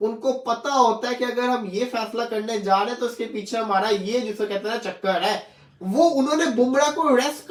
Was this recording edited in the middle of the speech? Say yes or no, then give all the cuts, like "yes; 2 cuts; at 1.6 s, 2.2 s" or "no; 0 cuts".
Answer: no; 0 cuts